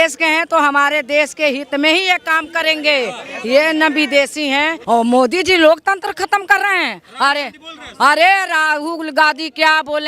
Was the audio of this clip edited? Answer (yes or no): yes